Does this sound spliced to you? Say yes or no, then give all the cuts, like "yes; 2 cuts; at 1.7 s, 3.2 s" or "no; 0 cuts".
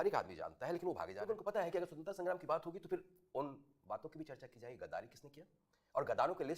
yes; 1 cut; at 1.4 s